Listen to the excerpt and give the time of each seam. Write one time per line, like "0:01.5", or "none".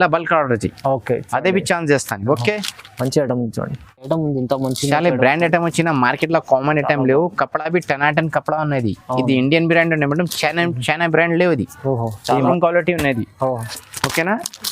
0:04.1
0:12.5